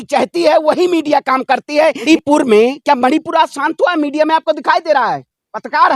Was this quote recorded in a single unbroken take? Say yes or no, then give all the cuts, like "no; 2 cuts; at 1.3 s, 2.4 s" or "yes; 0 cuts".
no; 1 cut; at 2.1 s